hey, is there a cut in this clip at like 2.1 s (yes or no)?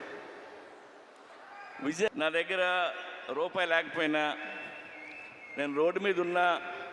yes